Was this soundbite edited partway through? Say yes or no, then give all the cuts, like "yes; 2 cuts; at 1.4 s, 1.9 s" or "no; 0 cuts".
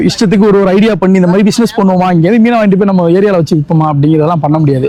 no; 0 cuts